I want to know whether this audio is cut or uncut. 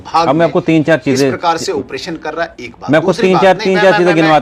uncut